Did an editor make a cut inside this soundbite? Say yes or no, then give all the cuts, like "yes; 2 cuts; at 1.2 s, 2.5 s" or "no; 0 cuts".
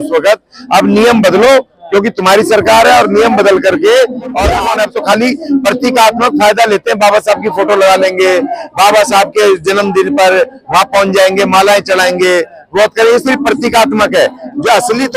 yes; 1 cut; at 4.5 s